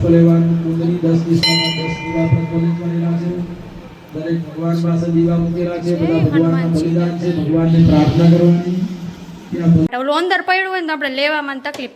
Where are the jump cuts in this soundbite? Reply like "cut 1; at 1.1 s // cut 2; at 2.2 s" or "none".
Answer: cut 1; at 9.9 s